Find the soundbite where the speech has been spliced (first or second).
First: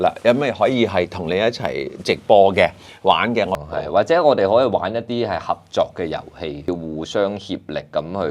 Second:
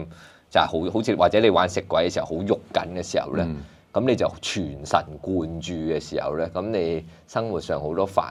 first